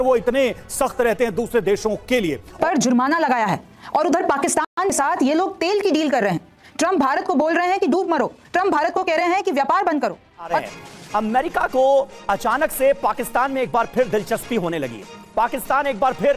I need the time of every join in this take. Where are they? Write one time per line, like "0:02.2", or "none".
0:02.6
0:10.5